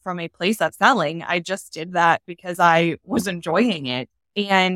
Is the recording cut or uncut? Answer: uncut